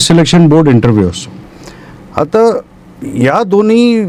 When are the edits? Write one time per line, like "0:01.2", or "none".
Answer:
none